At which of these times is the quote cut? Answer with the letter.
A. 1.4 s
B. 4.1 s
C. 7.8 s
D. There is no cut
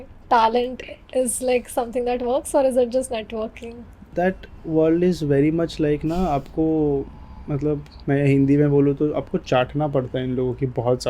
B